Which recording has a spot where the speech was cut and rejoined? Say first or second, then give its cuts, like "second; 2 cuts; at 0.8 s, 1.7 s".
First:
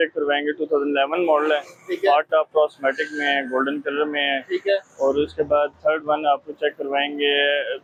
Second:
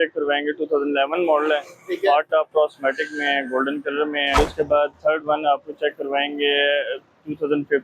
second; 1 cut; at 4.4 s